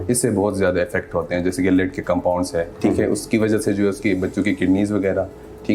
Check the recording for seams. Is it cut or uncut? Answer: uncut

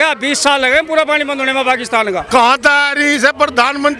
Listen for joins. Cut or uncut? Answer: cut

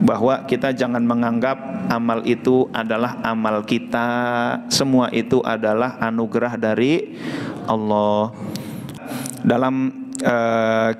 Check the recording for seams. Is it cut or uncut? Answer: cut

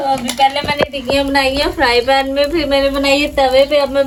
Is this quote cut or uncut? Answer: uncut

